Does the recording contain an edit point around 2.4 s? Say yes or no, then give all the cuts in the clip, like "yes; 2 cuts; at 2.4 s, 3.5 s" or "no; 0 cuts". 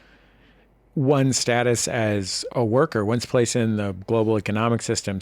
yes; 1 cut; at 2.4 s